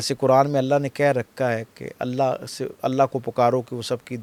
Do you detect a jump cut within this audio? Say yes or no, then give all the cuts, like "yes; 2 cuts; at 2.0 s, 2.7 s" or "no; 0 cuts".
no; 0 cuts